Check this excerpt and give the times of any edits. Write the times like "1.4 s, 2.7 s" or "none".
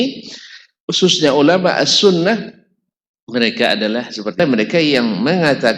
4.4 s